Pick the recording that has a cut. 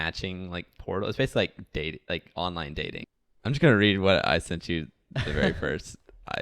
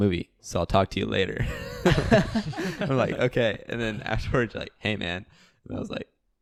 first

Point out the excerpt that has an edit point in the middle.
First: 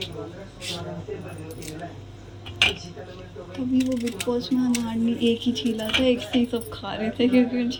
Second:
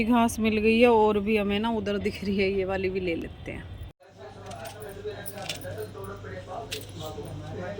second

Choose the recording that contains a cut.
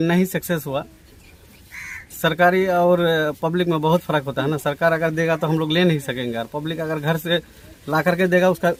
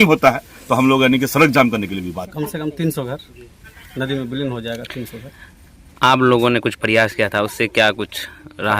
second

